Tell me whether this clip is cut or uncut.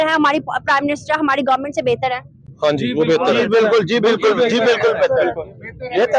uncut